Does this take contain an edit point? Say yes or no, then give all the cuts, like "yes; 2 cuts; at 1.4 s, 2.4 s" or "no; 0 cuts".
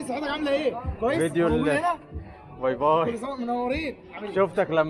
no; 0 cuts